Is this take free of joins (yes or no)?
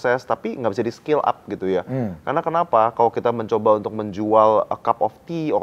yes